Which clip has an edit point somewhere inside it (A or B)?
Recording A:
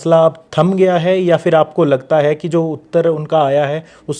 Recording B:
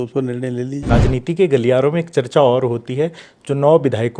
B